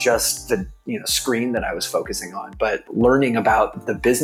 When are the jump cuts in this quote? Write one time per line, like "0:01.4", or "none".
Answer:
none